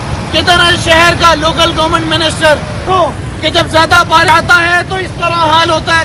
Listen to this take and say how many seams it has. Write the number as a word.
one